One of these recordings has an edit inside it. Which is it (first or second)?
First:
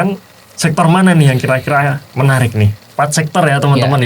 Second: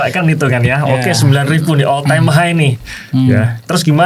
first